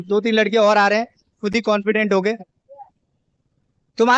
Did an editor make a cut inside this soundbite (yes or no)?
no